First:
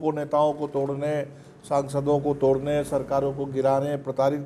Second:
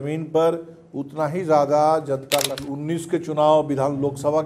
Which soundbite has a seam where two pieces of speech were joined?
second; 1 cut; at 2.7 s

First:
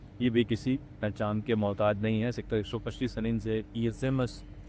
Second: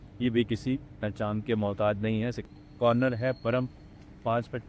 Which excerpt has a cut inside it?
second; 1 cut; at 2.4 s

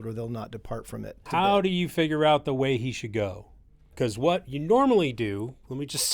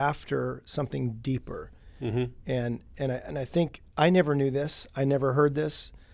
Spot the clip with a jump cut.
first; 2 cuts; at 1.2 s, 3.9 s

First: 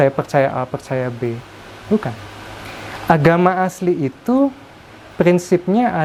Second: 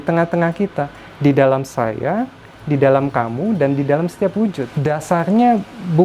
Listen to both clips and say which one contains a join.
second; 1 cut; at 4.7 s

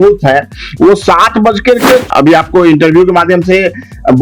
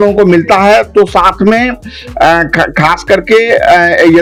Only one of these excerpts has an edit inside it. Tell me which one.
first; 1 cut; at 2.1 s

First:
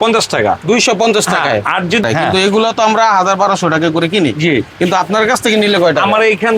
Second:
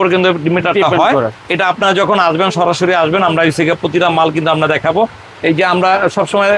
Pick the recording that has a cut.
first; 1 cut; at 2.0 s

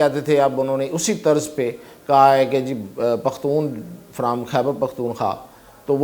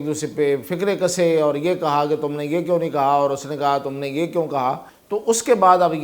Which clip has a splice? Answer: second; 1 cut; at 4.9 s

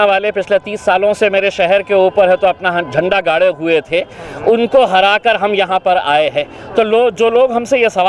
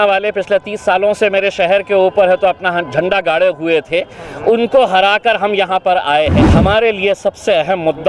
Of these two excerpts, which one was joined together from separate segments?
second; 1 cut; at 6.4 s

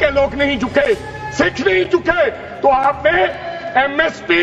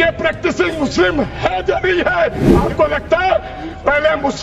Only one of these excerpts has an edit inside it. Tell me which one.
second; 1 cut; at 2.5 s

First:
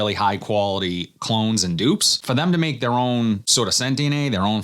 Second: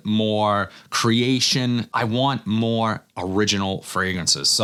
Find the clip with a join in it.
first; 2 cuts; at 2.2 s, 3.5 s

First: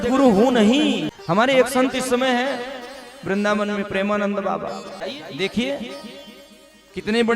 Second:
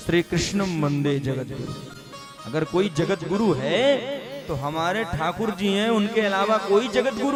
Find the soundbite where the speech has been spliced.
first; 2 cuts; at 1.1 s, 5.0 s

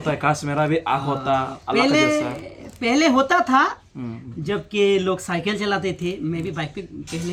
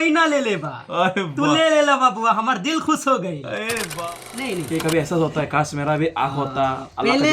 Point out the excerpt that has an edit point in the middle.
second; 1 cut; at 4.0 s

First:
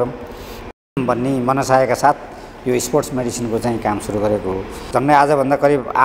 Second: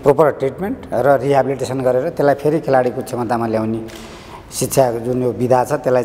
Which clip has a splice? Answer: first; 1 cut; at 4.8 s

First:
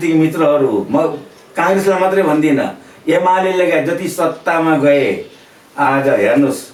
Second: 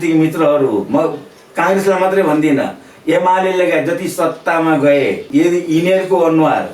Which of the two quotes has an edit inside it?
second; 1 cut; at 5.2 s

